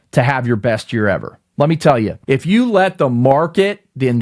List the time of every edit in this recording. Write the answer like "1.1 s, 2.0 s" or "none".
2.2 s